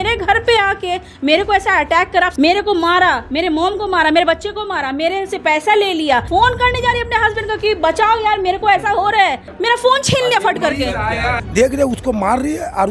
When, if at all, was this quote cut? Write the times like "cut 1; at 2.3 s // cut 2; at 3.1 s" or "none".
cut 1; at 2.3 s // cut 2; at 6.3 s // cut 3; at 9.5 s // cut 4; at 11.1 s